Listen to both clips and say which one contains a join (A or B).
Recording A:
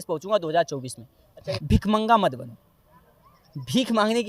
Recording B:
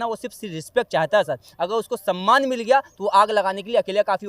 A